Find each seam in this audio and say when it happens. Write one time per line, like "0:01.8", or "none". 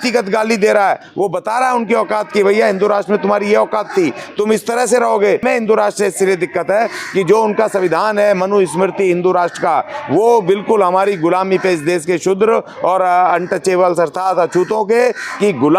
0:05.4